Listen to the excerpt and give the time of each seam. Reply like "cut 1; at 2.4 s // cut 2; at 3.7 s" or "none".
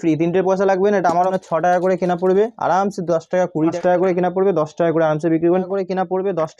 cut 1; at 1.3 s // cut 2; at 3.8 s // cut 3; at 5.7 s